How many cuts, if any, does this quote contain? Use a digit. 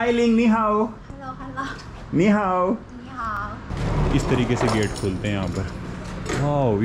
1